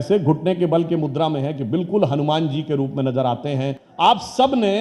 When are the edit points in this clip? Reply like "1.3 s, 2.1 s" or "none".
3.8 s